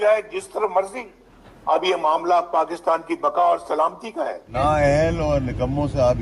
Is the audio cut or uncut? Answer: cut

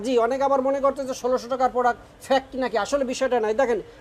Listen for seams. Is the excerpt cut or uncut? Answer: uncut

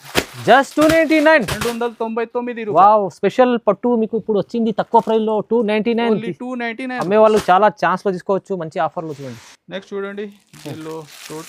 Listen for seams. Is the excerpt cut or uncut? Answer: uncut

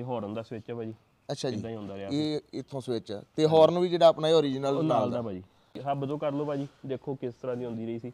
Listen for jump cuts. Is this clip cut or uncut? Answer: cut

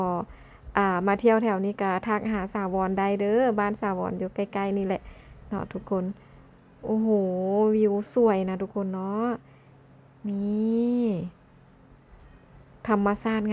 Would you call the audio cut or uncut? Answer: uncut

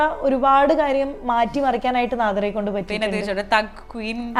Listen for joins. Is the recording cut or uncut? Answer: uncut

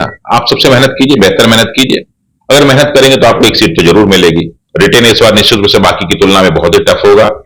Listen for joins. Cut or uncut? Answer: cut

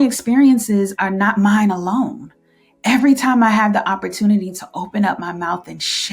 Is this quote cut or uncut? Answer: cut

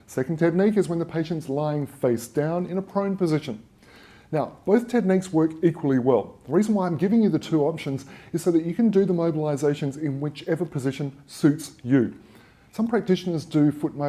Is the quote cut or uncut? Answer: cut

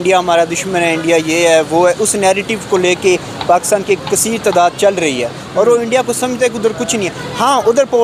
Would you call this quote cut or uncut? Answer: uncut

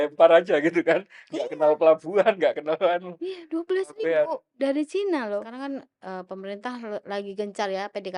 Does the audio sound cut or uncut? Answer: cut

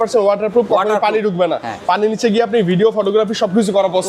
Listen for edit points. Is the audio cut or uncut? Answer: uncut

